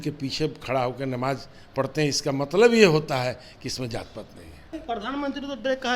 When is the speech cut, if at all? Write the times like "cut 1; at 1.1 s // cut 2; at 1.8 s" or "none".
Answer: cut 1; at 4.8 s

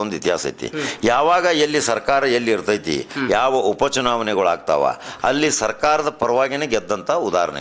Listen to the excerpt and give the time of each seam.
none

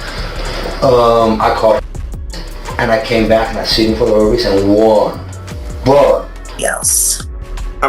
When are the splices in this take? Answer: cut 1; at 6.5 s

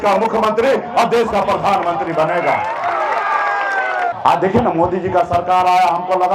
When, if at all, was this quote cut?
cut 1; at 4.1 s

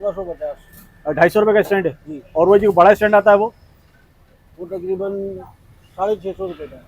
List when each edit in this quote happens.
none

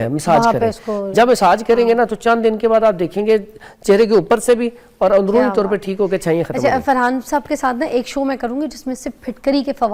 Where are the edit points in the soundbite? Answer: none

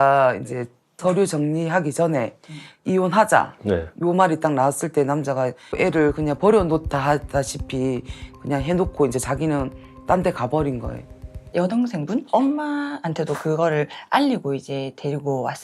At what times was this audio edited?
cut 1; at 5.6 s // cut 2; at 11.5 s

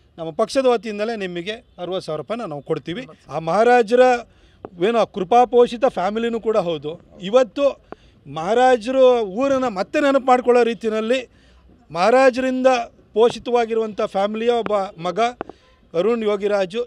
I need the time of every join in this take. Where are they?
cut 1; at 3.1 s

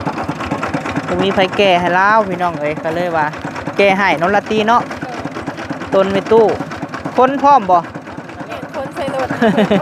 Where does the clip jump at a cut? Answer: none

